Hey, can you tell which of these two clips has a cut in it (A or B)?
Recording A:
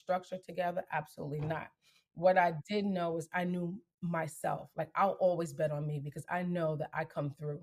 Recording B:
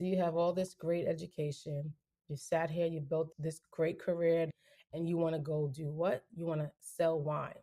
B